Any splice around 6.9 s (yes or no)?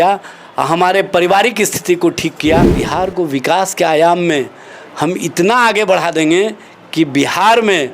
no